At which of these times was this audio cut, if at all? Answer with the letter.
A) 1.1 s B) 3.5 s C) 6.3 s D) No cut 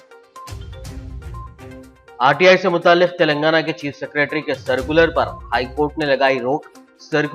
A